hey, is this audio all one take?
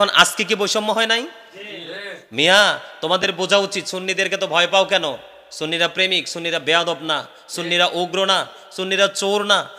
yes; 0 cuts

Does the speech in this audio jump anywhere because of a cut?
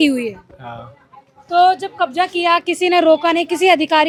no; 0 cuts

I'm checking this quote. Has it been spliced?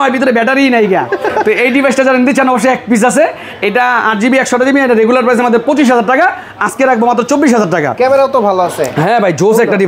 no; 0 cuts

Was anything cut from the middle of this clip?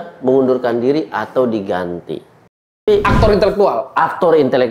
yes; 1 cut; at 2.9 s

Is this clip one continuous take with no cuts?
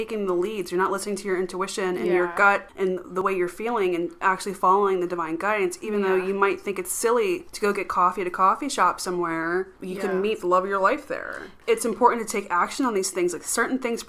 no; 4 cuts; at 3.0 s, 7.5 s, 9.8 s, 11.5 s

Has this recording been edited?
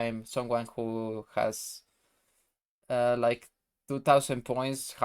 no; 0 cuts

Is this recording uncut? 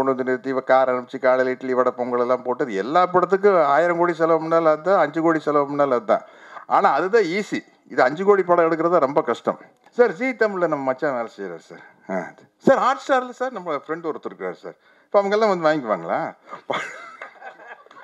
no; 1 cut; at 9.8 s

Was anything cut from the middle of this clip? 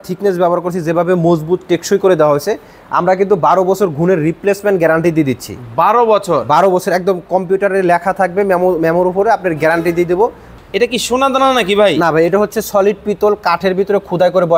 yes; 1 cut; at 10.5 s

